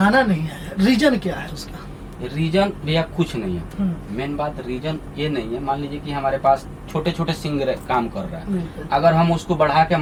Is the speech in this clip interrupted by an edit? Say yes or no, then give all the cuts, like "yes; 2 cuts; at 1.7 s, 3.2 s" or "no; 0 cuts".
no; 0 cuts